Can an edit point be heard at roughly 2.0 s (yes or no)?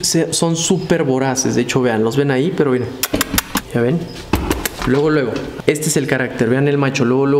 no